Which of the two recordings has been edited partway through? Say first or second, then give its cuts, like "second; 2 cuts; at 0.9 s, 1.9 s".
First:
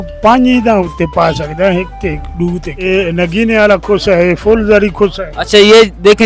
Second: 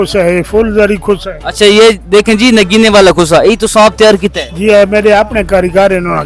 first; 1 cut; at 2.9 s